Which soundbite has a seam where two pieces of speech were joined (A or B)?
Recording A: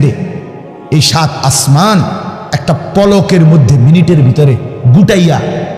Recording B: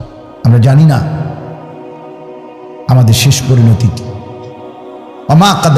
B